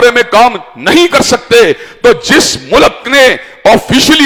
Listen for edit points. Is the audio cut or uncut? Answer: uncut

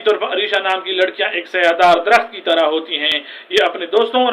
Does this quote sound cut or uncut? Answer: uncut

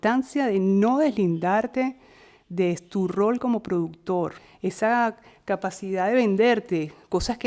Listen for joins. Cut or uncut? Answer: cut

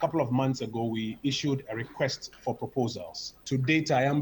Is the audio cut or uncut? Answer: uncut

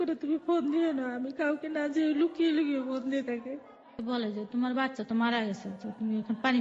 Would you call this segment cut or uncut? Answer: cut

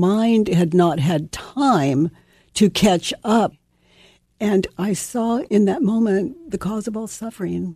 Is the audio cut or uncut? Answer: cut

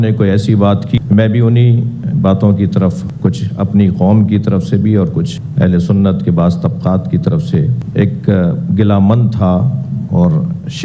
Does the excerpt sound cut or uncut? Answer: cut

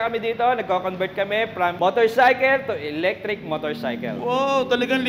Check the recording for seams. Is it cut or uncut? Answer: uncut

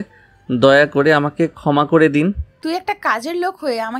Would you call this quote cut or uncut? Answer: cut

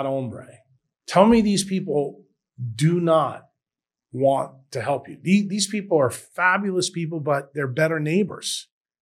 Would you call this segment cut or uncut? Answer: uncut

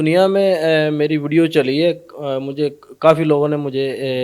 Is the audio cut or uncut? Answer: uncut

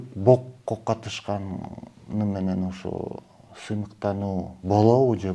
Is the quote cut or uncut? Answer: uncut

